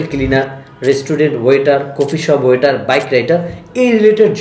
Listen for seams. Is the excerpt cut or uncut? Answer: uncut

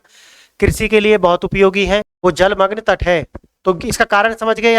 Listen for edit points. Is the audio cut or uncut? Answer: cut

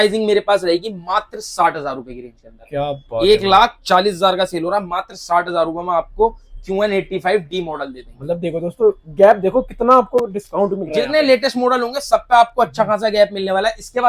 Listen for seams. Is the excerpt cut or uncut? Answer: uncut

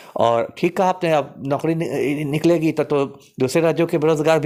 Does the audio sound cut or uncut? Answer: uncut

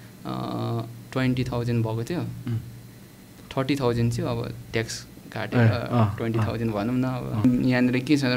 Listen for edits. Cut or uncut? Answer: cut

